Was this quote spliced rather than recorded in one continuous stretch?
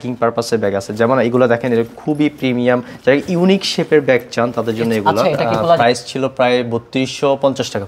yes; 1 cut; at 5.8 s

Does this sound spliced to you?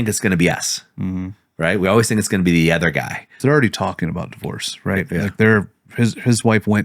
yes; 1 cut; at 3.4 s

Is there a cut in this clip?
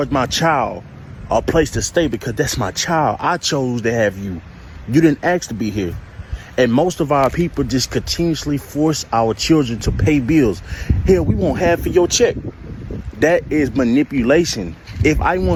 no; 0 cuts

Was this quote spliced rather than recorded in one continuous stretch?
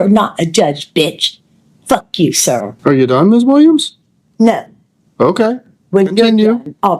yes; 1 cut; at 2.7 s

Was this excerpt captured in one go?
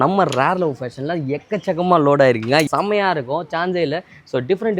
no; 1 cut; at 2.7 s

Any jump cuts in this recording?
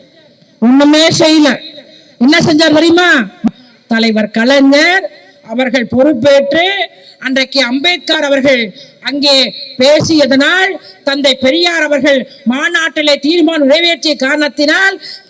yes; 1 cut; at 3.5 s

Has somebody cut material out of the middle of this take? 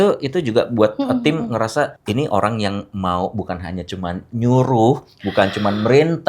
yes; 1 cut; at 2.0 s

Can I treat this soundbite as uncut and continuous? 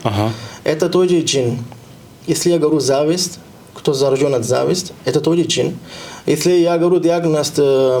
yes; 0 cuts

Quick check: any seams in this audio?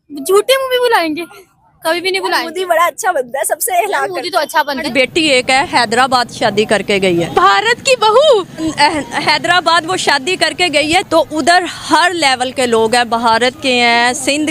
yes; 3 cuts; at 4.8 s, 7.3 s, 8.7 s

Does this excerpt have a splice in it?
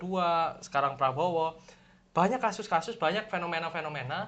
no; 0 cuts

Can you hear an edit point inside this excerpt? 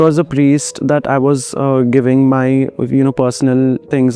no; 0 cuts

